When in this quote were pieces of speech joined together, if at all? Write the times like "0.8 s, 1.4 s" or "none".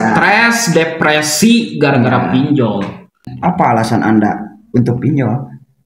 3.3 s